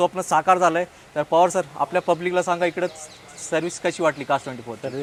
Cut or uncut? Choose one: uncut